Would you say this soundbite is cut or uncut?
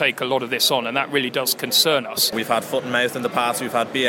cut